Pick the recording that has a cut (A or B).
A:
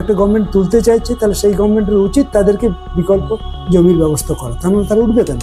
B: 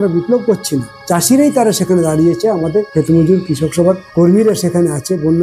B